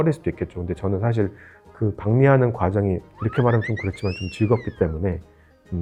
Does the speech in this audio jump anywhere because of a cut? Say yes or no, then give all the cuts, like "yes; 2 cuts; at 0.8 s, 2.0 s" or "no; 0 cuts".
no; 0 cuts